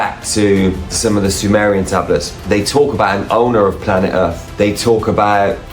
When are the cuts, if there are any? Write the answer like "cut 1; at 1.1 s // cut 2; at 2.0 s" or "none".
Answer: cut 1; at 0.9 s

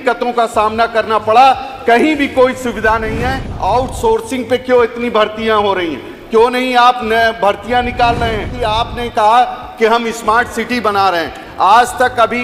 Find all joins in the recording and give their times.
cut 1; at 3.5 s // cut 2; at 8.5 s

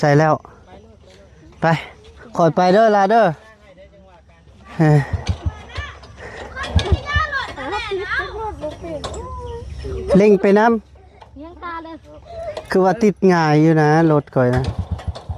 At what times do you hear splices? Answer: cut 1; at 12.3 s

